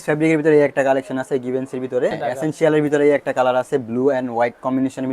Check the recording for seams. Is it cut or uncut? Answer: cut